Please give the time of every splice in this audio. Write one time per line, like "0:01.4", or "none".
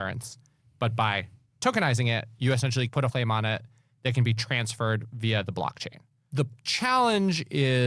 0:03.1
0:06.3